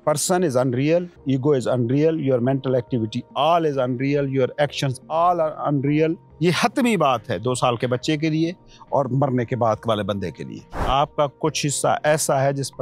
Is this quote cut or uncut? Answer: cut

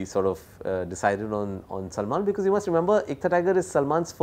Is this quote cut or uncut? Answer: uncut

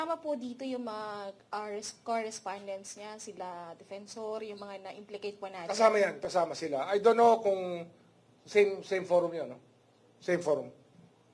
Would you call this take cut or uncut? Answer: uncut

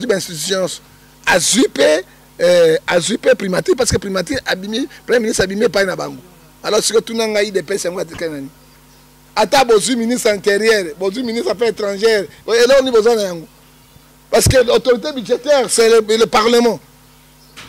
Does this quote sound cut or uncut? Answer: uncut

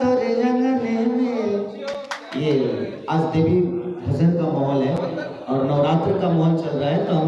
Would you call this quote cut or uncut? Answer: uncut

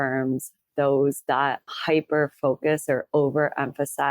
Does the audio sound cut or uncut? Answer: cut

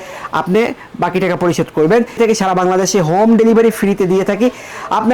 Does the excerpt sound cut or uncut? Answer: cut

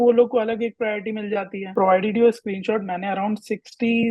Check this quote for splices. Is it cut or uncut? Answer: cut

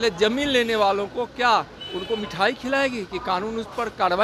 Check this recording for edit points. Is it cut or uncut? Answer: uncut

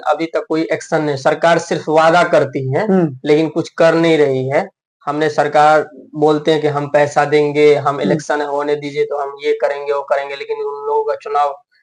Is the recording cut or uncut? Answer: uncut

